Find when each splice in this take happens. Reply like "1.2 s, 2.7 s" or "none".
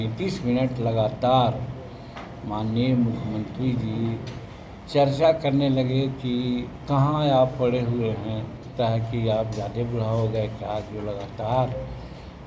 8.7 s